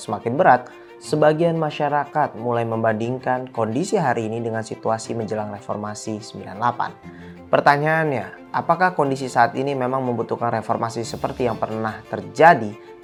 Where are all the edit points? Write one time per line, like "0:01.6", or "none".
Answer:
none